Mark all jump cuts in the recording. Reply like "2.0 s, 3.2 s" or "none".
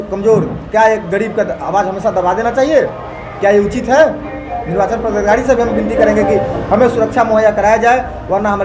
none